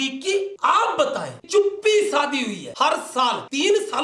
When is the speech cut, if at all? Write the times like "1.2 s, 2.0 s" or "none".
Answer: 1.4 s, 2.7 s